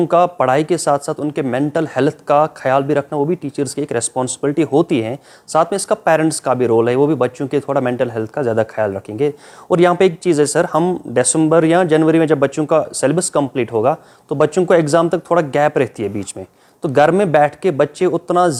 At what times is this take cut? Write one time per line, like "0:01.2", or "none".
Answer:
none